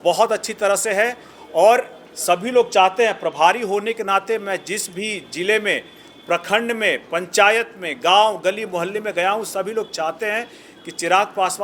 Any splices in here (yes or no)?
no